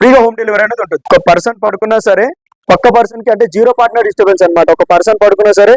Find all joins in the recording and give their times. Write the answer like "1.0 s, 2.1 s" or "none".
1.0 s